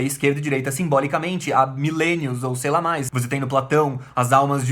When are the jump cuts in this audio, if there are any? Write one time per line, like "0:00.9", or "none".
0:03.1